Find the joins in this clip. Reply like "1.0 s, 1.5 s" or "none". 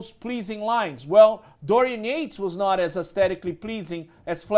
none